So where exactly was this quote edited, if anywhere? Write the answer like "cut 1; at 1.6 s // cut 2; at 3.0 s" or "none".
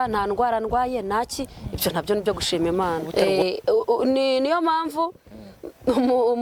cut 1; at 3.1 s